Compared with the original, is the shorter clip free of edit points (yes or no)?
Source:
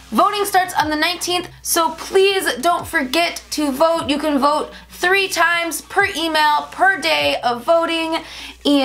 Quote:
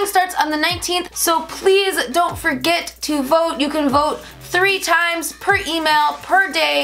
no